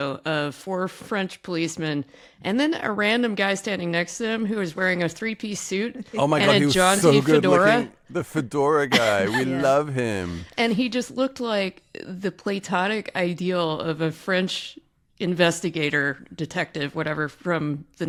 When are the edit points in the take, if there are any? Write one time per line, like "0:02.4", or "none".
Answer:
none